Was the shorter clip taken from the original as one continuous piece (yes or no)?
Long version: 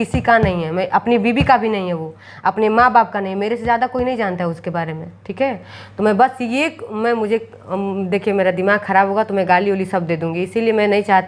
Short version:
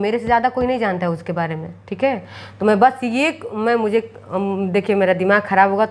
yes